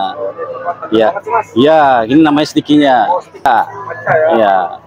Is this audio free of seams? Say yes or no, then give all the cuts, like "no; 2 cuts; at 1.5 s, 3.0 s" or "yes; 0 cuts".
no; 1 cut; at 3.5 s